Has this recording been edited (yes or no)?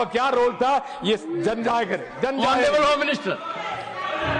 no